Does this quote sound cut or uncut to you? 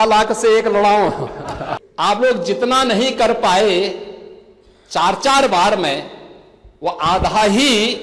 cut